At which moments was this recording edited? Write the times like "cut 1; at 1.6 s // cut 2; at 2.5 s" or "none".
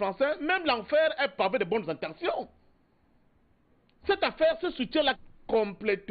none